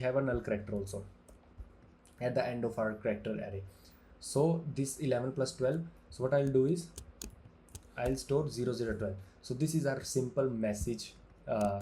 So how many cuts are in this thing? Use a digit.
0